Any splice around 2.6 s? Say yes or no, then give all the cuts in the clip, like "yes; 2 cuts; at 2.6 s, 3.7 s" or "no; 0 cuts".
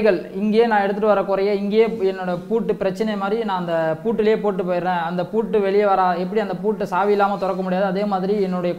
no; 0 cuts